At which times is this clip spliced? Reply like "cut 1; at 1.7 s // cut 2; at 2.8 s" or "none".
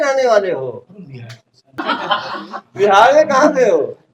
cut 1; at 1.8 s

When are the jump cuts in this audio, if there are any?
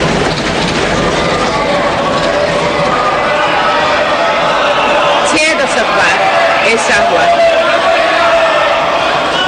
none

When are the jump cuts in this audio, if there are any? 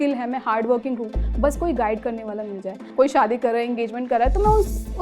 cut 1; at 2.8 s

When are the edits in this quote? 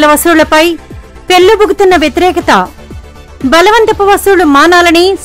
none

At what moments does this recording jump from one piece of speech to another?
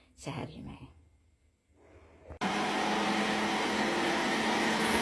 none

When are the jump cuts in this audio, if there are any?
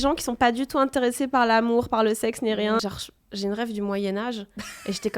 cut 1; at 2.8 s

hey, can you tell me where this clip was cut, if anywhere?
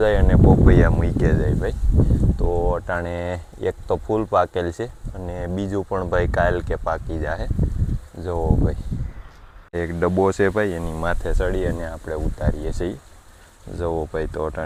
none

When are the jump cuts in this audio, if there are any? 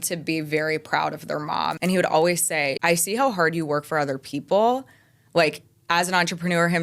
cut 1; at 1.8 s // cut 2; at 2.8 s

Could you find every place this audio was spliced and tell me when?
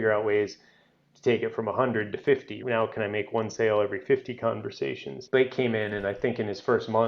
cut 1; at 2.5 s // cut 2; at 5.2 s

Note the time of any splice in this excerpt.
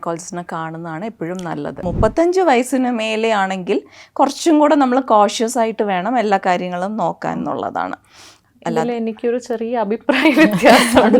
cut 1; at 1.8 s

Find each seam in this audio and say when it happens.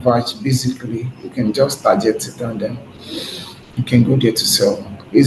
none

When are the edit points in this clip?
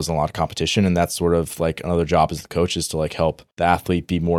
cut 1; at 3.5 s

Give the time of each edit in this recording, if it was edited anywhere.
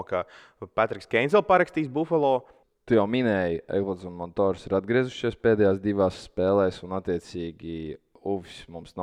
cut 1; at 2.6 s

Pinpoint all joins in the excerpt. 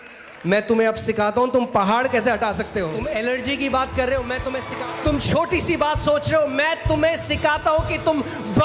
cut 1; at 3.0 s // cut 2; at 4.6 s

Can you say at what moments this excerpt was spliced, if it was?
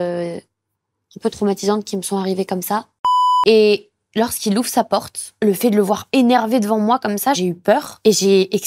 cut 1; at 3.1 s

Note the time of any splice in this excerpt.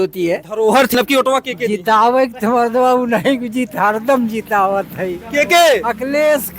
cut 1; at 0.9 s

